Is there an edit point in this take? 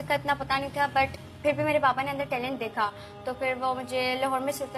no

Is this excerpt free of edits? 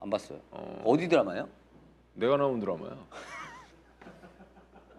yes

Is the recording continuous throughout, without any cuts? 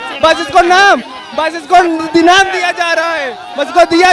yes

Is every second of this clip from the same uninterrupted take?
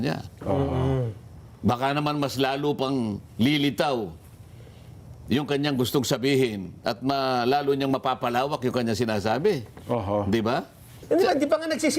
no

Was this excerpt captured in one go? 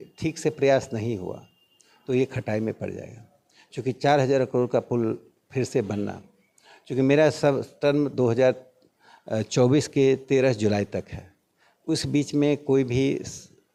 yes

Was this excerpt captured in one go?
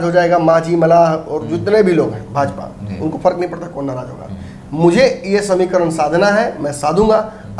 yes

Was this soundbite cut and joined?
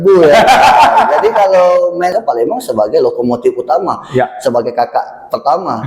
yes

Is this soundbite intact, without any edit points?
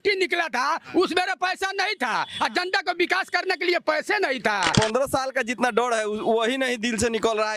no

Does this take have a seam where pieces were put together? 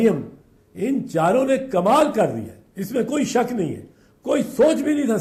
no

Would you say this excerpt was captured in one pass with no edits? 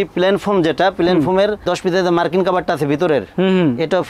yes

